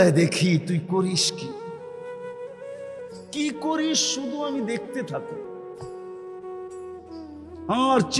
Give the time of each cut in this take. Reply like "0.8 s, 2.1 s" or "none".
1.2 s, 2.9 s